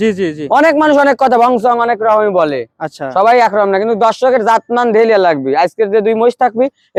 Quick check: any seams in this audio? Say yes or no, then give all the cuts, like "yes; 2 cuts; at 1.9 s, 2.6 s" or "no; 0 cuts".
no; 0 cuts